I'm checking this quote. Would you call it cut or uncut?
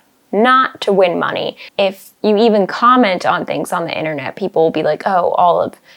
cut